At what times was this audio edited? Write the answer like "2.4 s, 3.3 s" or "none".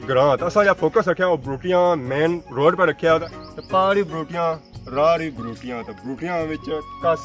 3.3 s